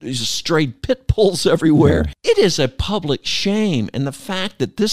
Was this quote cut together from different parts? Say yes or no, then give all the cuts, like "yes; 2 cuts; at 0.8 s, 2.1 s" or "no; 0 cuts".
yes; 1 cut; at 2.1 s